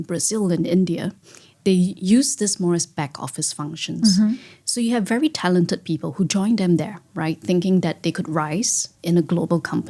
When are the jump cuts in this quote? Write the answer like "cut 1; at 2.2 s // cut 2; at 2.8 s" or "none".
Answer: cut 1; at 2.0 s